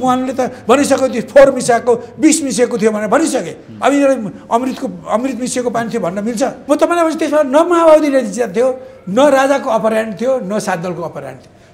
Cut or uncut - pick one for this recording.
cut